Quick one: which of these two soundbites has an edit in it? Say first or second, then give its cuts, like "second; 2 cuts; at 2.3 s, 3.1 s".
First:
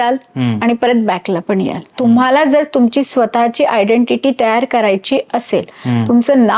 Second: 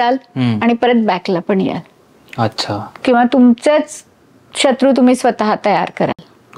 first; 1 cut; at 1.9 s